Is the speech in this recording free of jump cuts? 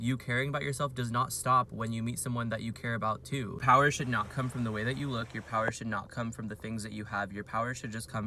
no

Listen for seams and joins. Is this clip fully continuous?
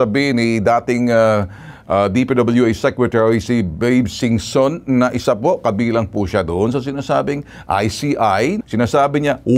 yes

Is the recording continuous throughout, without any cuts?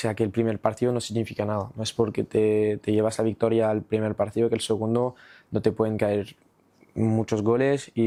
yes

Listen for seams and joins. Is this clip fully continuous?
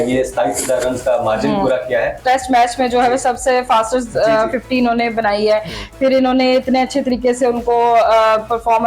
no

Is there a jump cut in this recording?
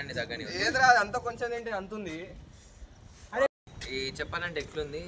yes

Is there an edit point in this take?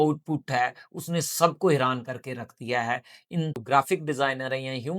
yes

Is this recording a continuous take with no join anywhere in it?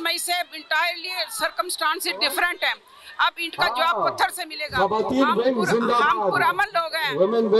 yes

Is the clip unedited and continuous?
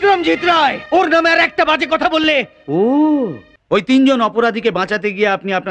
no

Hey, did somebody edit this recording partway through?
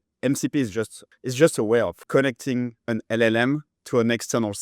yes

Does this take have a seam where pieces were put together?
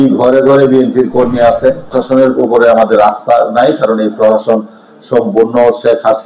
yes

